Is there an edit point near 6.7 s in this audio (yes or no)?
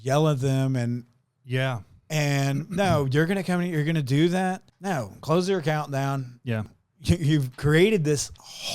yes